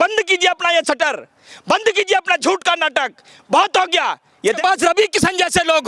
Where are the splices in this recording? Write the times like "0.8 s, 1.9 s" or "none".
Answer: 4.6 s